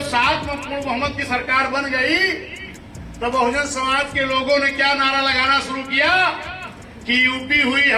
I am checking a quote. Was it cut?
no; 0 cuts

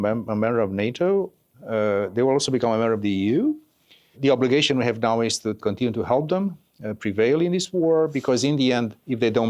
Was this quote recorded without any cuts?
no; 3 cuts; at 1.5 s, 4.1 s, 5.6 s

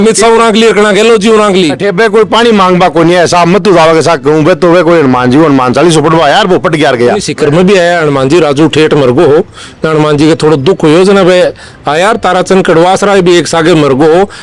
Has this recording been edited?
yes; 2 cuts; at 1.8 s, 7.2 s

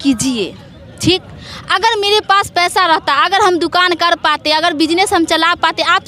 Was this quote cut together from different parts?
no; 0 cuts

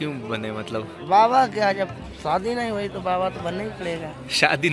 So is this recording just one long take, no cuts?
yes; 0 cuts

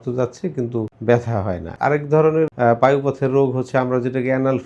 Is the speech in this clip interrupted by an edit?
yes; 3 cuts; at 0.9 s, 1.7 s, 2.5 s

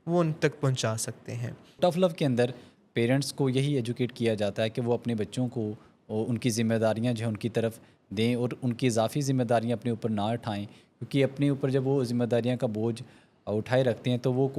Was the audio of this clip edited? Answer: yes; 1 cut; at 1.8 s

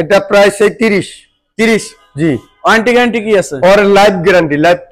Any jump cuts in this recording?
no; 0 cuts

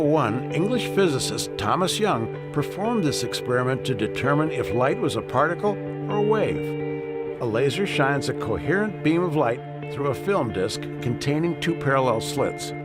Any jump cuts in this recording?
yes; 1 cut; at 9.2 s

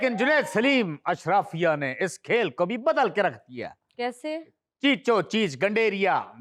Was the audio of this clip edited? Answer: no; 0 cuts

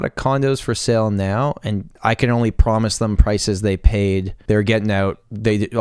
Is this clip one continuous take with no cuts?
no; 2 cuts; at 2.0 s, 4.3 s

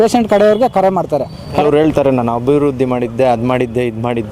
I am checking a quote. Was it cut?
yes; 1 cut; at 1.5 s

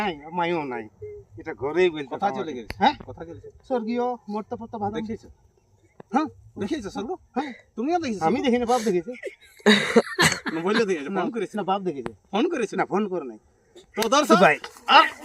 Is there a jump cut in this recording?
yes; 1 cut; at 14.3 s

